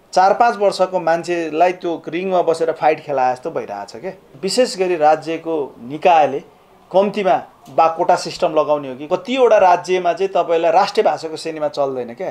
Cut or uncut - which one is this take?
cut